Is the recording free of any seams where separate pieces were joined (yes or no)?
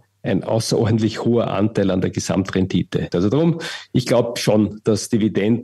no